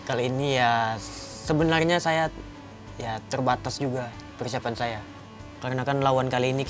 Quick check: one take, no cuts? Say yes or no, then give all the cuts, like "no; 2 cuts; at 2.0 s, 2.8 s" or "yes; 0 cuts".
no; 1 cut; at 5.2 s